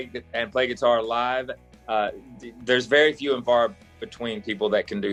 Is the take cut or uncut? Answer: uncut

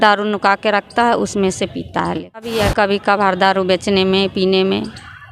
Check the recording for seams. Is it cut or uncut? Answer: cut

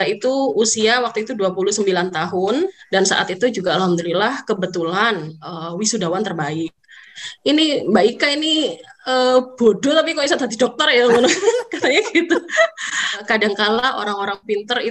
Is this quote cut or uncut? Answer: cut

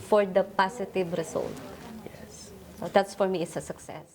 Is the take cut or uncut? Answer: uncut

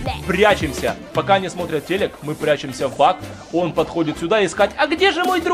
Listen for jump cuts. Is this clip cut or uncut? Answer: uncut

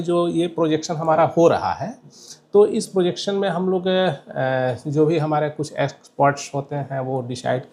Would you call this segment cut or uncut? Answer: uncut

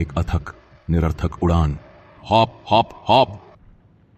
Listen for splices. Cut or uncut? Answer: uncut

